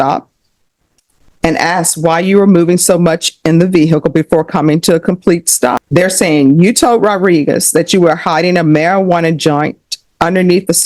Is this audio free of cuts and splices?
no; 1 cut; at 5.8 s

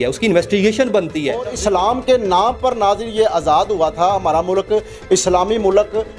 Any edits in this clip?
yes; 1 cut; at 1.5 s

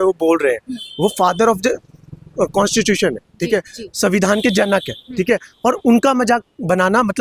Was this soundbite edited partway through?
no; 0 cuts

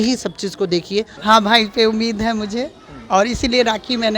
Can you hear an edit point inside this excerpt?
yes; 1 cut; at 1.1 s

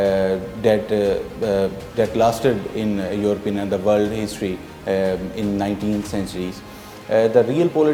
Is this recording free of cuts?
yes; 0 cuts

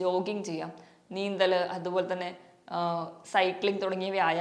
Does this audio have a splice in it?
no; 0 cuts

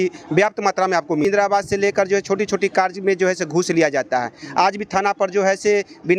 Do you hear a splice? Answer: yes; 1 cut; at 1.2 s

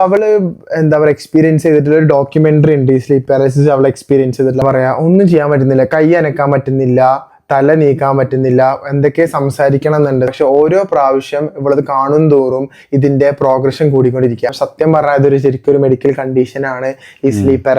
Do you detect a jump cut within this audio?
yes; 3 cuts; at 4.6 s, 10.3 s, 14.6 s

